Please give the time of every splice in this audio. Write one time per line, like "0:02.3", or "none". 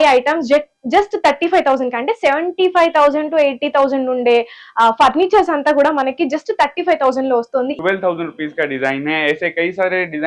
0:07.7